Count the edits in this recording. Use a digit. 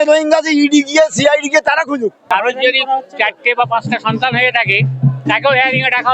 1